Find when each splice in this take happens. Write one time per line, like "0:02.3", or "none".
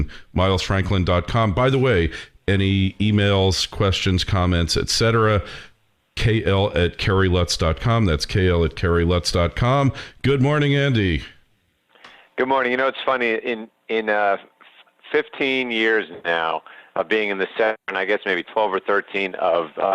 none